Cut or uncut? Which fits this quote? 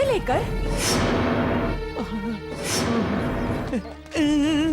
cut